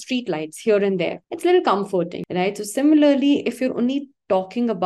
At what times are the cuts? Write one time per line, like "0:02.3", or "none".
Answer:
0:01.2
0:02.1